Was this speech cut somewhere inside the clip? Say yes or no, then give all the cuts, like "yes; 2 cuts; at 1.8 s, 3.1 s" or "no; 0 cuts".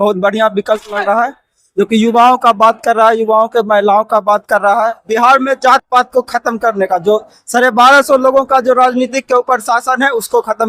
no; 0 cuts